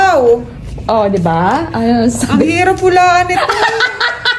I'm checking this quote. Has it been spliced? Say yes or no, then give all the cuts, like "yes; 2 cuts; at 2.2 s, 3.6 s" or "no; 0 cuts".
no; 0 cuts